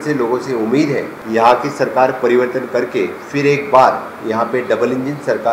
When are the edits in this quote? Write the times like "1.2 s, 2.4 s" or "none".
1.1 s